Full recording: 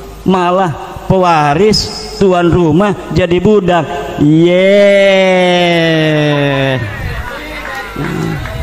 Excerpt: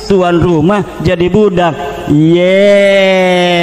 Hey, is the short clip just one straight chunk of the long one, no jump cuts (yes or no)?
yes